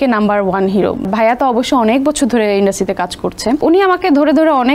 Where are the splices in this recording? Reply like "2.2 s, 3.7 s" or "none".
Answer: 1.1 s, 3.6 s